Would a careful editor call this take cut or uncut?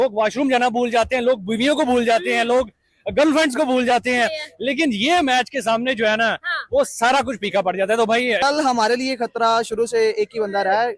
uncut